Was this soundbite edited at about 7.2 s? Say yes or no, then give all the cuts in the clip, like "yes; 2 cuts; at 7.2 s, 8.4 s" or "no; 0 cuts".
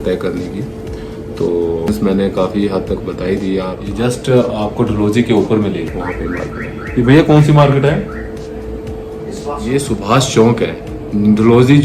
no; 4 cuts; at 1.9 s, 3.8 s, 5.9 s, 9.7 s